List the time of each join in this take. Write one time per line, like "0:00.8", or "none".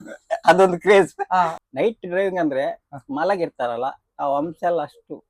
0:01.5